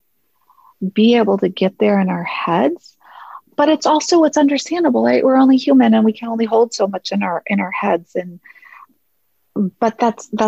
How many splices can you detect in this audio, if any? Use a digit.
2